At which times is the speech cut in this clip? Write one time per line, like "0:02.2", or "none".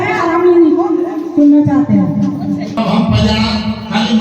0:02.7